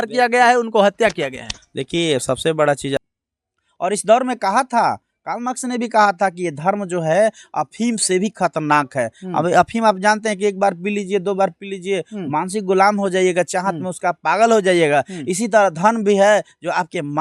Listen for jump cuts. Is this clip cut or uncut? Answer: cut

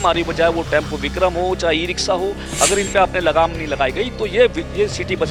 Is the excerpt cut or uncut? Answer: uncut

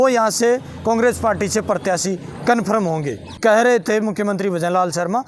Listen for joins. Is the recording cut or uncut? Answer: cut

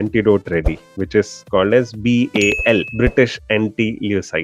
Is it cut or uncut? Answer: cut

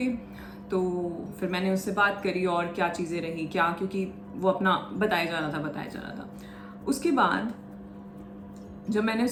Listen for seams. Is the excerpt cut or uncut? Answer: uncut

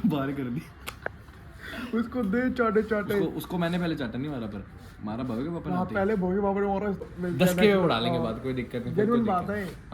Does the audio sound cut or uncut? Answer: cut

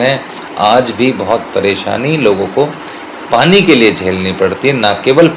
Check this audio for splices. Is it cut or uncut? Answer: uncut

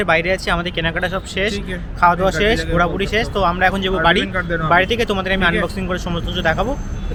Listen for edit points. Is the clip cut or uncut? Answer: uncut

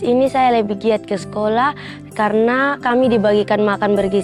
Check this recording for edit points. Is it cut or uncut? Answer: uncut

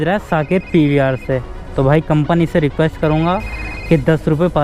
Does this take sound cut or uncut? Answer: uncut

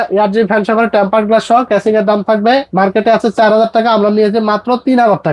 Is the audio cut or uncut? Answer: uncut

